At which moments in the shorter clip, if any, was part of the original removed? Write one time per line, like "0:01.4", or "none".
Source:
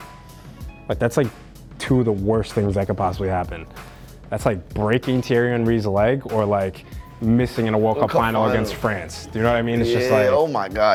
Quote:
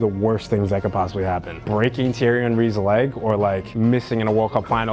0:01.6
0:03.7